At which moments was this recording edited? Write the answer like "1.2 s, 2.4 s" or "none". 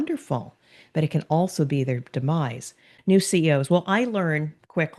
2.9 s